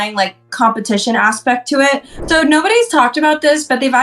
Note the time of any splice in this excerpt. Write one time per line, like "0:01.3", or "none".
0:02.1